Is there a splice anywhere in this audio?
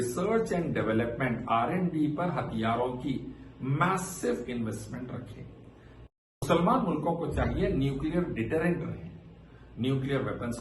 yes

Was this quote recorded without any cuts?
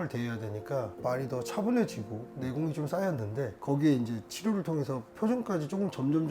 no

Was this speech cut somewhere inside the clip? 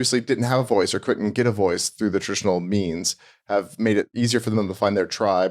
yes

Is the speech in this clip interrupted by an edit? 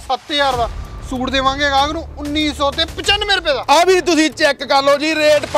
no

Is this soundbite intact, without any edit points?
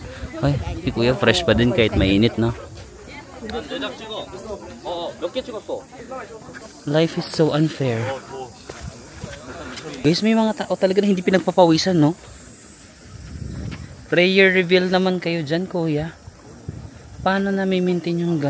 no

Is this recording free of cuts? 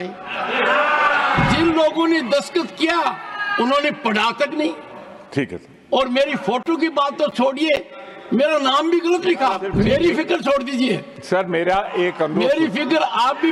no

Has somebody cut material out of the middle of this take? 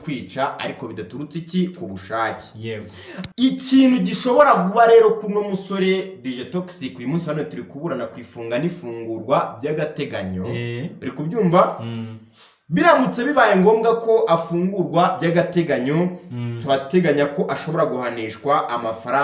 yes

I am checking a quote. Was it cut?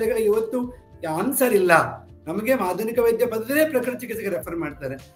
no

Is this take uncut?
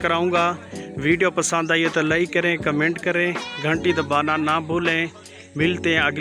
yes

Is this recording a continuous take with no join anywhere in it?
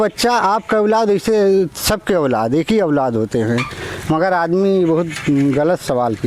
yes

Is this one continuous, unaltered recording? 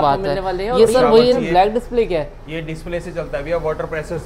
no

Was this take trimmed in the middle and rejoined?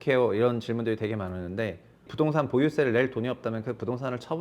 yes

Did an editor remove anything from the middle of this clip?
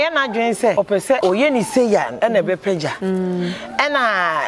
yes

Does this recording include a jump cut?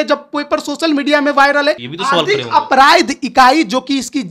yes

